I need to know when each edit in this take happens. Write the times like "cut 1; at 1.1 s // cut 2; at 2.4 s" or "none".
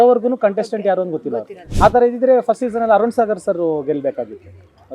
cut 1; at 1.6 s